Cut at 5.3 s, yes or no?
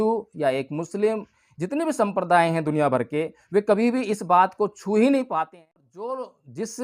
yes